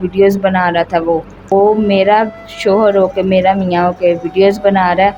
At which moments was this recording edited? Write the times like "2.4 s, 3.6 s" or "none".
1.4 s